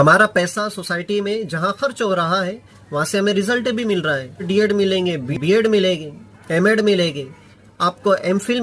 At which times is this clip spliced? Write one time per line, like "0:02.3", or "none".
0:04.5